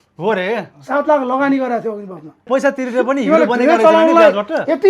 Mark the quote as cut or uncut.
cut